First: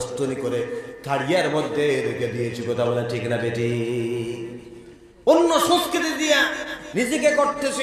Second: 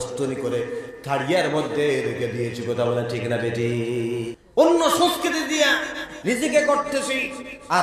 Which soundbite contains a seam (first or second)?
second